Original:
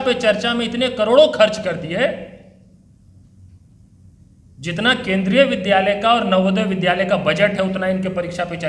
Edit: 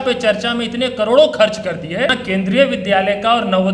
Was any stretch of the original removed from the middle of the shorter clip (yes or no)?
yes